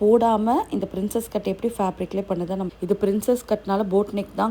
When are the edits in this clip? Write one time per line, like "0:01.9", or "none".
0:02.7